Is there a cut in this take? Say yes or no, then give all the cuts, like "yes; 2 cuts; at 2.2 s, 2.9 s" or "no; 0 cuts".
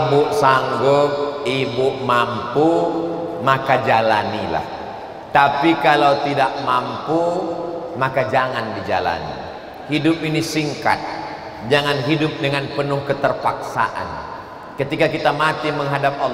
no; 0 cuts